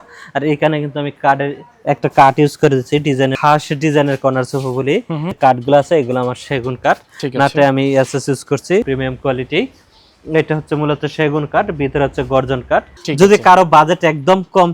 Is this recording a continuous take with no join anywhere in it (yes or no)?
no